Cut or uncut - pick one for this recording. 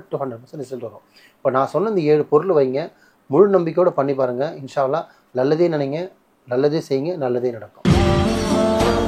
cut